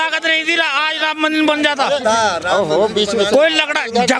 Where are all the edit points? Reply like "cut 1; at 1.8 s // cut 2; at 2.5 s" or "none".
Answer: none